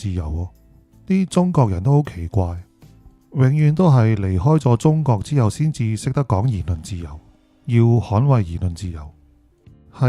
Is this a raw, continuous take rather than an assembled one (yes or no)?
yes